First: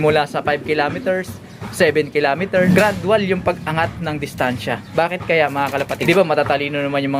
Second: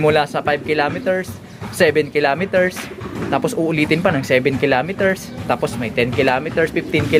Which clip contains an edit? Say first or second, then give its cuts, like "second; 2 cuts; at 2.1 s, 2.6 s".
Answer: first; 2 cuts; at 2.7 s, 6.0 s